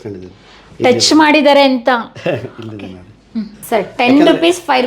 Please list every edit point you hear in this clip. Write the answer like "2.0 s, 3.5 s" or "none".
3.6 s